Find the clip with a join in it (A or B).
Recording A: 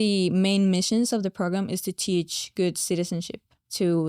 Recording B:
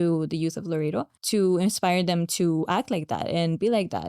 B